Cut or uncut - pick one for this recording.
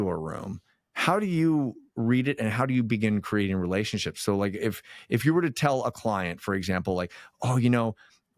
uncut